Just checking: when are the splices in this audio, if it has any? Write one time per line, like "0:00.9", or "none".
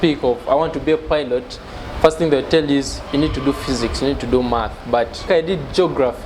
0:05.3